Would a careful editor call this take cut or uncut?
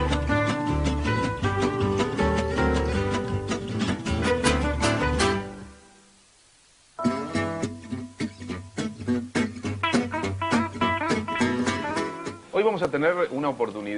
cut